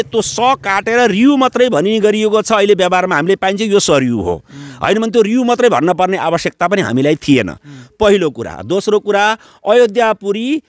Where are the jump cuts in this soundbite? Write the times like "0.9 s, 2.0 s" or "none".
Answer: none